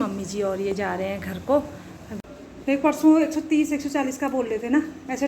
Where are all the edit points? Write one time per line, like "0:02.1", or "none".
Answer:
0:02.2